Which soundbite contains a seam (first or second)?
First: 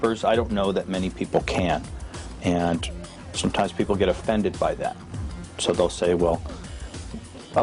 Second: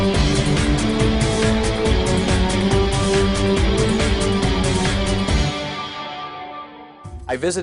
first